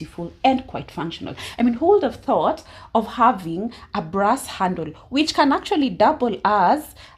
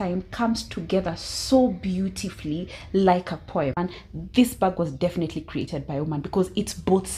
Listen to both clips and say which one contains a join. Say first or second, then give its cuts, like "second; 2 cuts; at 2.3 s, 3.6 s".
second; 1 cut; at 3.8 s